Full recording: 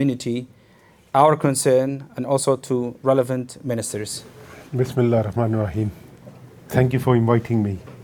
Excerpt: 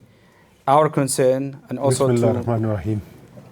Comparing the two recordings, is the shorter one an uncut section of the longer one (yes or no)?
no